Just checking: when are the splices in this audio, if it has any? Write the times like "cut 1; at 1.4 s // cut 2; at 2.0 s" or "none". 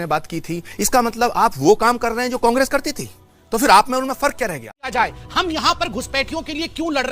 cut 1; at 4.9 s